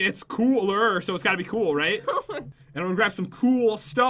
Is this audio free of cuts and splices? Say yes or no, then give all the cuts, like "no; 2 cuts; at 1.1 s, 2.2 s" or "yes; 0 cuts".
no; 1 cut; at 2.4 s